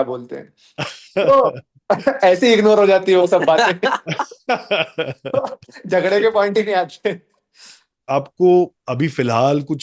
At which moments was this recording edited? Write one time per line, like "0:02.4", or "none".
0:08.0